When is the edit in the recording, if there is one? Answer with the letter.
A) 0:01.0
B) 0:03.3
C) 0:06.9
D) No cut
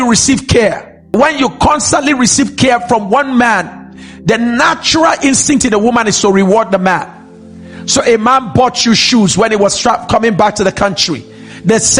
A